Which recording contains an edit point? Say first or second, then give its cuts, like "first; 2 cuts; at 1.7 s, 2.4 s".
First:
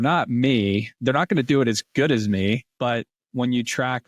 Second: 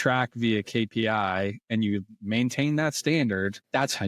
first; 2 cuts; at 0.9 s, 2.7 s